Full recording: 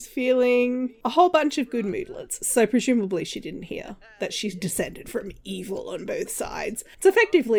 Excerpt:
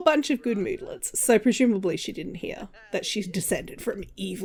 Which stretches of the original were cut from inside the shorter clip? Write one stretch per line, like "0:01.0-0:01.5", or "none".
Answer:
none